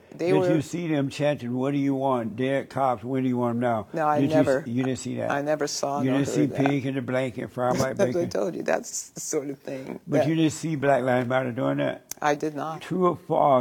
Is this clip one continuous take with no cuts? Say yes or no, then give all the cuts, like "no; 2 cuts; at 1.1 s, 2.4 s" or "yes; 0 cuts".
no; 1 cut; at 12.7 s